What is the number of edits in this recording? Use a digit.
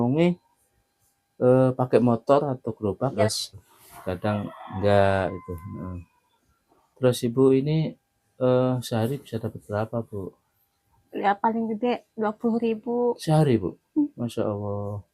1